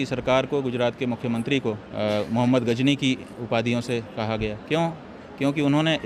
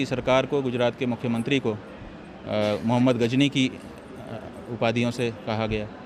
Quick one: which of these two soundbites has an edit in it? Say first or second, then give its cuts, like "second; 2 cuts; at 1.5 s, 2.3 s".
first; 3 cuts; at 1.9 s, 3.3 s, 4.6 s